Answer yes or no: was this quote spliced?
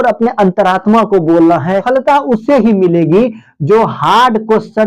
yes